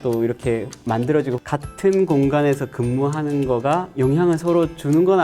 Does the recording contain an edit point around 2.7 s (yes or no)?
no